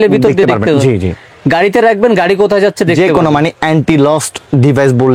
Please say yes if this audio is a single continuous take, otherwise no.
yes